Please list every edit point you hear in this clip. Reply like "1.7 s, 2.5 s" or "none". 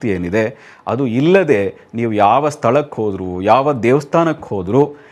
none